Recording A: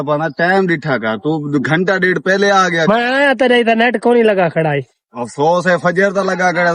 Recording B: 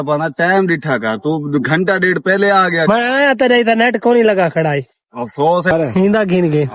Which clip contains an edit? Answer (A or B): B